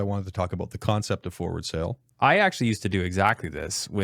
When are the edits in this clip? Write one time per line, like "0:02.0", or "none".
0:02.0